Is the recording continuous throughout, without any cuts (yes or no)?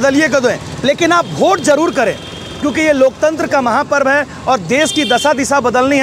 yes